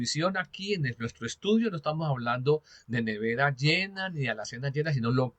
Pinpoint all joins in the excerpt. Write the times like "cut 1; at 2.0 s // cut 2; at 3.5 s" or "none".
none